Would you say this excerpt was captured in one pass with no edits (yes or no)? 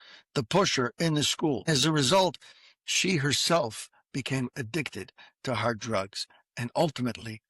no